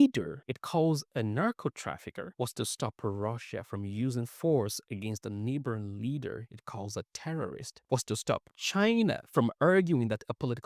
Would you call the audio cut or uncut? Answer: uncut